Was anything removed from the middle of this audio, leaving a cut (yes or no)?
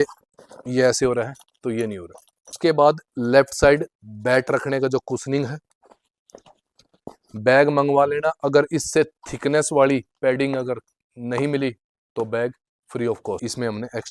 yes